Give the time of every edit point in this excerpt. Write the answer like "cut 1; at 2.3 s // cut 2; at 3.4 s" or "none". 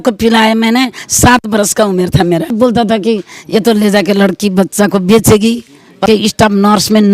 cut 1; at 2.5 s // cut 2; at 6.0 s